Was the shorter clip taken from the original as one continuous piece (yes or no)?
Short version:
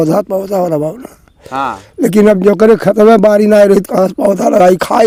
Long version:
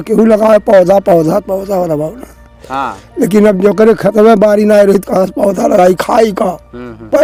yes